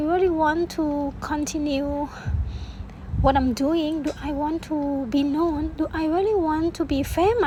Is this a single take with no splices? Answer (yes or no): yes